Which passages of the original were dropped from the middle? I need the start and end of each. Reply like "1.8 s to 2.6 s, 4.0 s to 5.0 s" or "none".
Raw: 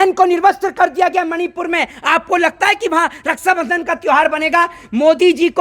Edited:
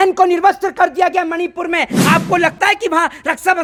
none